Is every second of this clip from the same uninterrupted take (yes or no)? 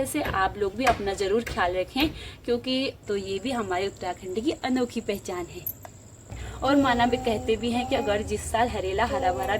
no